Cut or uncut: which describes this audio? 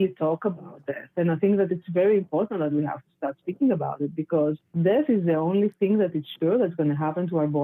uncut